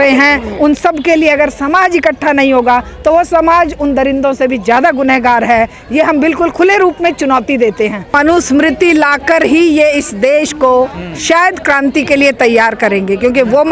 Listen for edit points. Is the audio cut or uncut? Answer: cut